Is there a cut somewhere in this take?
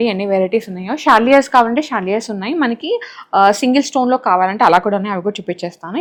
no; 0 cuts

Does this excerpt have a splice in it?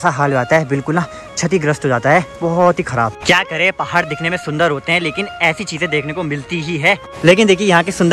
no; 0 cuts

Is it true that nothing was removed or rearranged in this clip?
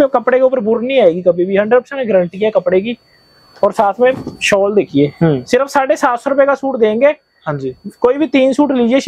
yes; 0 cuts

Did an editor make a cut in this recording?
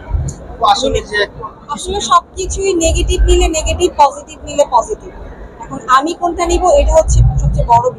yes; 1 cut; at 1.8 s

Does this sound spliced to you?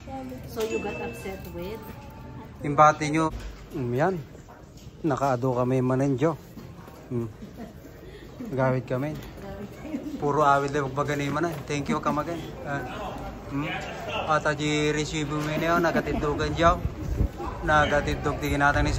yes; 1 cut; at 3.3 s

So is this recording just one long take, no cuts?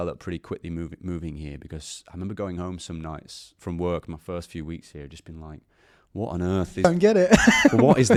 yes; 0 cuts

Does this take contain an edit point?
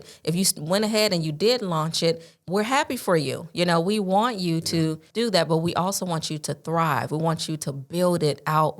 yes; 2 cuts; at 2.4 s, 5.0 s

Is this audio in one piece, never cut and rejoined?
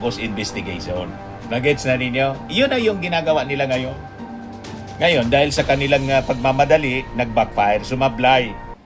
yes; 0 cuts

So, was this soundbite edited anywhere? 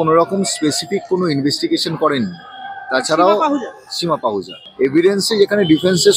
yes; 1 cut; at 4.6 s

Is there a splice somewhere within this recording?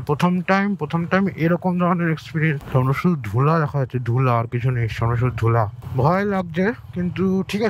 yes; 1 cut; at 2.6 s

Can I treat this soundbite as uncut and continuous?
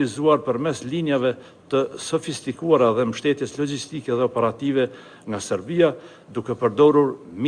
yes; 0 cuts

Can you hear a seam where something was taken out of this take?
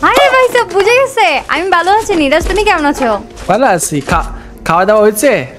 no; 0 cuts

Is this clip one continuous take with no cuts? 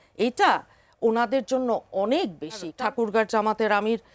no; 1 cut; at 2.7 s

